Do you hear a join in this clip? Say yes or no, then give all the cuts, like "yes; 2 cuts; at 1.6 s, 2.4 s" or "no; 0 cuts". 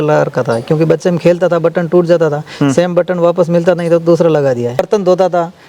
yes; 1 cut; at 4.8 s